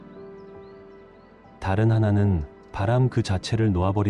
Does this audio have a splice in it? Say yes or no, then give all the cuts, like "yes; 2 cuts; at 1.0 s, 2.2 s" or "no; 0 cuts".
yes; 1 cut; at 1.6 s